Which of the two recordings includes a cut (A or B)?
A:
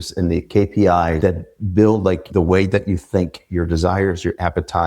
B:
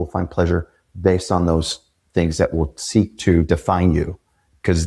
A